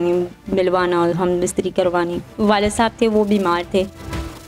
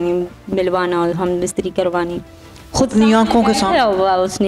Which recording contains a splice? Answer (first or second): first